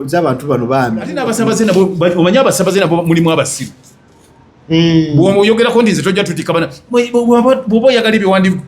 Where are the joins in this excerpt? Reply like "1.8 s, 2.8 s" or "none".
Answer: 1.2 s